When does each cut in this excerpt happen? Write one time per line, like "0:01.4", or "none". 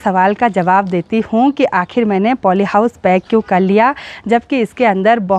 none